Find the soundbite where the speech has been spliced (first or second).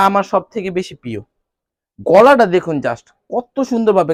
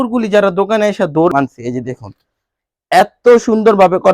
second